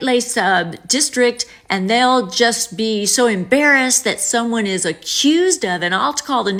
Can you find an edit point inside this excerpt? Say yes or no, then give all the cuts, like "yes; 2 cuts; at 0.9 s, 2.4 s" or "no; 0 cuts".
no; 0 cuts